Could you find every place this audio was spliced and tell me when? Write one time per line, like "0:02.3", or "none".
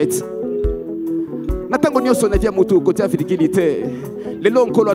none